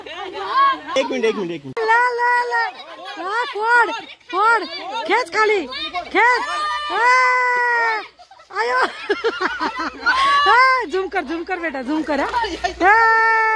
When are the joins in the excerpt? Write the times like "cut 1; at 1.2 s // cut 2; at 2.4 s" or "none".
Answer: cut 1; at 1.8 s